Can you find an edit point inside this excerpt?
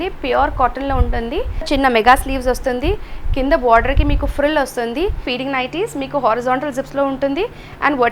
yes; 2 cuts; at 1.7 s, 5.2 s

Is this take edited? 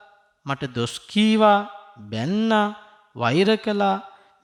no; 0 cuts

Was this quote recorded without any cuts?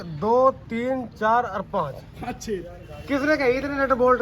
yes; 0 cuts

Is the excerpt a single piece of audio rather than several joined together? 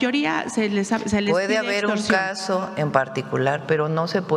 yes; 0 cuts

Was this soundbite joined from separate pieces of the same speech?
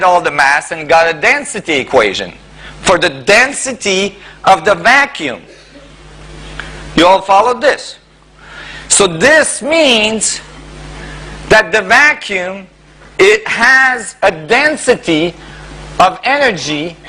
no; 0 cuts

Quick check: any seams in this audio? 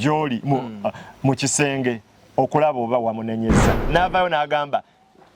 yes; 1 cut; at 3.8 s

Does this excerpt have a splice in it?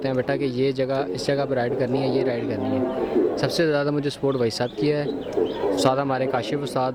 no; 0 cuts

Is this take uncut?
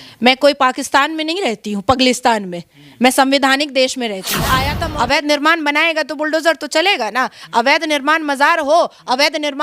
no; 1 cut; at 4.7 s

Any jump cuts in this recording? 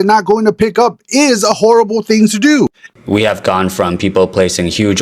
yes; 1 cut; at 2.9 s

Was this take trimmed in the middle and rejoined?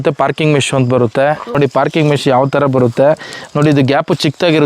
yes; 1 cut; at 1.5 s

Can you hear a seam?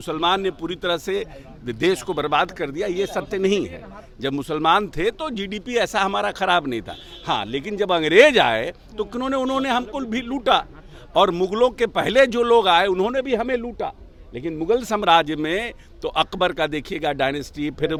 no; 0 cuts

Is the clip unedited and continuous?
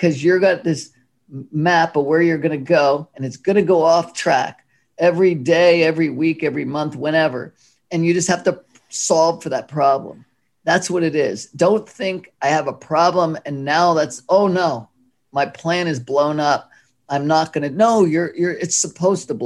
yes; 0 cuts

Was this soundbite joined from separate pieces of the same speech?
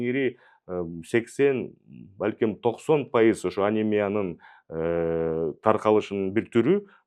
no; 0 cuts

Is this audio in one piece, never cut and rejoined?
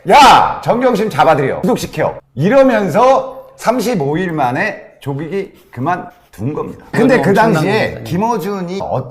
no; 2 cuts; at 1.6 s, 7.0 s

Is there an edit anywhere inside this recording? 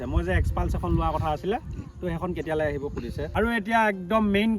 yes; 1 cut; at 3.3 s

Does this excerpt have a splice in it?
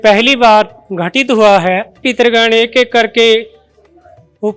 yes; 1 cut; at 2.0 s

